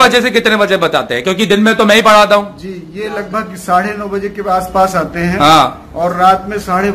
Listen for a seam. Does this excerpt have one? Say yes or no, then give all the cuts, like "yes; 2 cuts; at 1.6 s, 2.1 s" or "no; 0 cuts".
no; 0 cuts